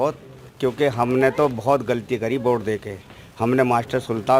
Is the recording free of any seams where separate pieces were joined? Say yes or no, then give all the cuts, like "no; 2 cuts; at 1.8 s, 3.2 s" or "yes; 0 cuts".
yes; 0 cuts